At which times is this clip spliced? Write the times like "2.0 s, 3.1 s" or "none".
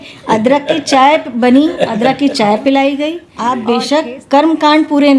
3.3 s